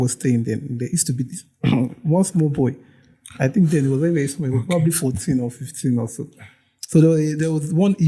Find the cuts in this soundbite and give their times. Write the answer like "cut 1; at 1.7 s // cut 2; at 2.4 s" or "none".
none